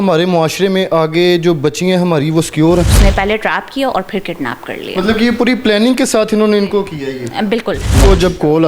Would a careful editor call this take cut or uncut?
cut